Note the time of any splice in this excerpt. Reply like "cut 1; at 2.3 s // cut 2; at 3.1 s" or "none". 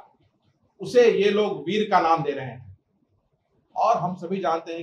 none